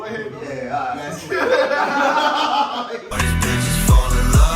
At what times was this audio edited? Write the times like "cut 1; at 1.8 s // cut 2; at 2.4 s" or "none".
cut 1; at 3.1 s

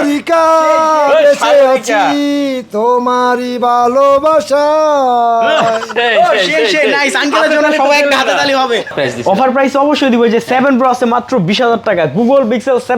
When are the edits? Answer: cut 1; at 8.9 s

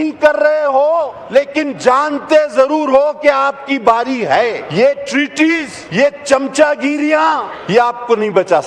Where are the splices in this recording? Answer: cut 1; at 1.2 s // cut 2; at 4.6 s // cut 3; at 5.8 s // cut 4; at 7.5 s

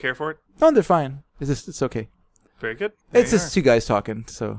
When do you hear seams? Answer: none

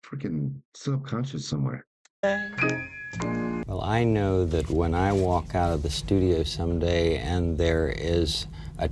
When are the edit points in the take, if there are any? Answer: cut 1; at 3.6 s

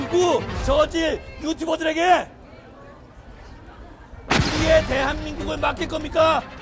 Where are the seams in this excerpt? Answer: none

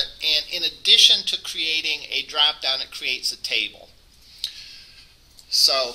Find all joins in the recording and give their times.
cut 1; at 2.3 s

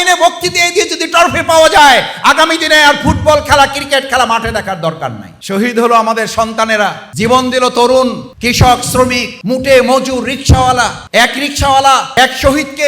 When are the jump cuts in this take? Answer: cut 1; at 5.3 s // cut 2; at 7.0 s // cut 3; at 8.3 s // cut 4; at 9.3 s // cut 5; at 11.0 s // cut 6; at 12.1 s

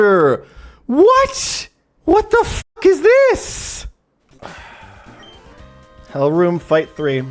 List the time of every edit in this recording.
none

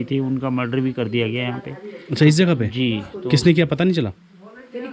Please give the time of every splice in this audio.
none

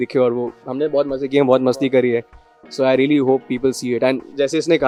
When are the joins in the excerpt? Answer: none

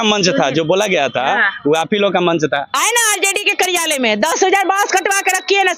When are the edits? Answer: cut 1; at 2.7 s

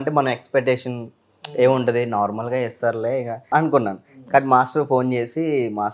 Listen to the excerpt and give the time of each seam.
cut 1; at 3.4 s

